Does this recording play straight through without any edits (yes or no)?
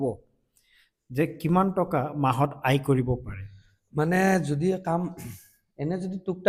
yes